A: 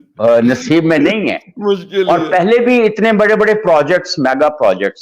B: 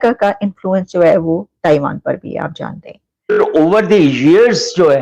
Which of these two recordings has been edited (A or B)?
B